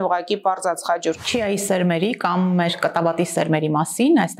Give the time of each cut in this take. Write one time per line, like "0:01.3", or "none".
0:01.2

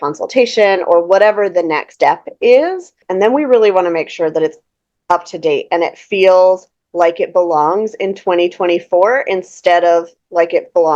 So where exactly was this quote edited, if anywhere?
0:01.8
0:03.0

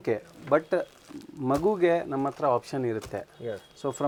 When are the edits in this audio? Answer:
none

